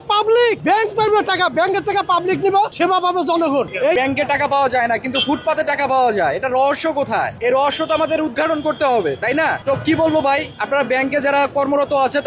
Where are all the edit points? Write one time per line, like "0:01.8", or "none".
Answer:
0:03.9